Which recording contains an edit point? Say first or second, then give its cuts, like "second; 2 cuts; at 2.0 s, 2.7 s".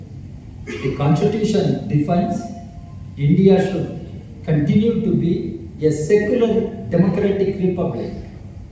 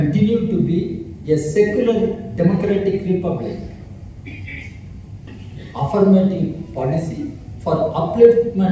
second; 1 cut; at 5.2 s